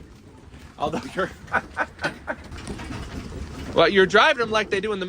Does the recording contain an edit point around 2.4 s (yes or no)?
yes